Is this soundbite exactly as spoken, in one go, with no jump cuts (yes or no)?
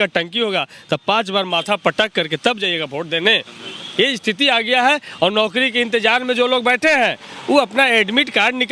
yes